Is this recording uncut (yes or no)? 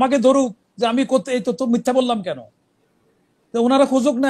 yes